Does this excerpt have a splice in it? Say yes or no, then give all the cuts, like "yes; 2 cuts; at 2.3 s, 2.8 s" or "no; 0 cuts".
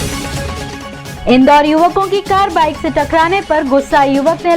yes; 1 cut; at 1.1 s